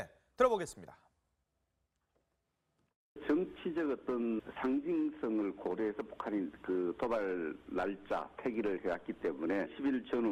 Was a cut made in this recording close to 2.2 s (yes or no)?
no